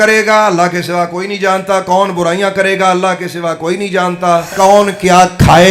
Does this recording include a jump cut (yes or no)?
yes